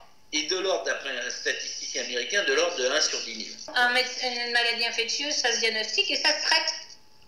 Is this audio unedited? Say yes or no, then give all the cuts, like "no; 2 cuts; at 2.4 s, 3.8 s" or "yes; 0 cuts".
no; 1 cut; at 3.7 s